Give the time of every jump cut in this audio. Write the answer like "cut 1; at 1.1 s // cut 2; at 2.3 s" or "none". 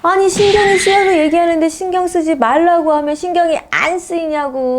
none